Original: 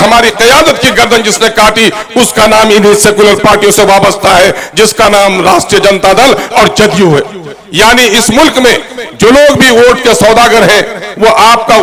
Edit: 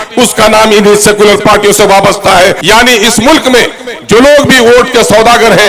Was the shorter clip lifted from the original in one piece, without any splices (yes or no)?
no